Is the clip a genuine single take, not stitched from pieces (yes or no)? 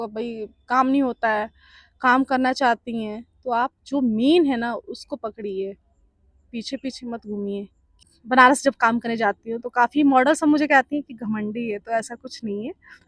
no